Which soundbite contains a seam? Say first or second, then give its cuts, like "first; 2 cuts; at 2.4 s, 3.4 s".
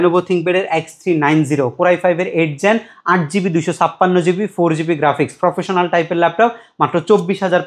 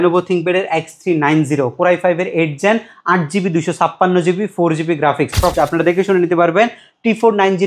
second; 1 cut; at 5.5 s